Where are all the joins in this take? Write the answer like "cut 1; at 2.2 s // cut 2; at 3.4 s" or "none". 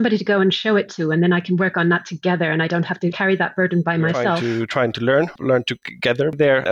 cut 1; at 4.6 s